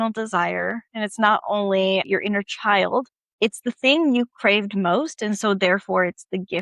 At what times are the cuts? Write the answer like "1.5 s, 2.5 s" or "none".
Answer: 2.1 s, 3.2 s

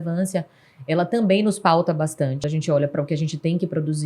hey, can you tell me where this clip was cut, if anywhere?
2.4 s

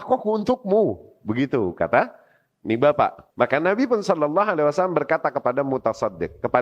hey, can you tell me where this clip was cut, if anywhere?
3.2 s

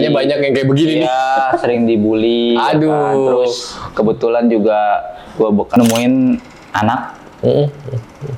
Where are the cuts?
5.8 s

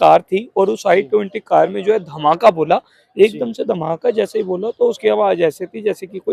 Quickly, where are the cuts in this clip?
none

